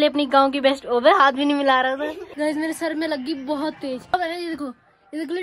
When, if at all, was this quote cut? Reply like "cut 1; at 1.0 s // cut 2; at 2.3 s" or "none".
cut 1; at 2.2 s // cut 2; at 4.1 s